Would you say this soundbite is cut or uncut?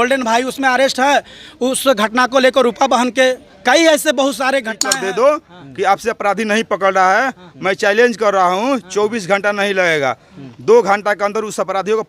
cut